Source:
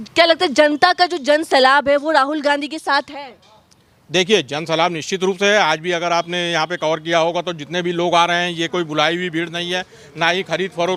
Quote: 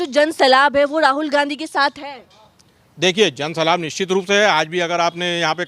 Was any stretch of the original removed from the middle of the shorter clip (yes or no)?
no